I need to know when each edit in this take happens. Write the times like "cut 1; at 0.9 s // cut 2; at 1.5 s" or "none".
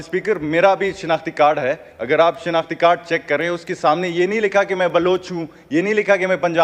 none